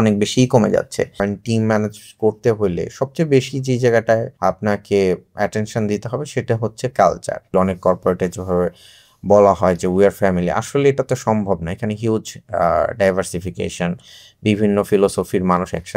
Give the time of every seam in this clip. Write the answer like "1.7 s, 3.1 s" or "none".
1.1 s, 4.3 s, 7.5 s